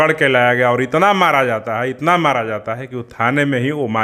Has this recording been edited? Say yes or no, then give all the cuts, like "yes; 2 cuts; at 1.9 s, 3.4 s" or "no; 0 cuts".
no; 0 cuts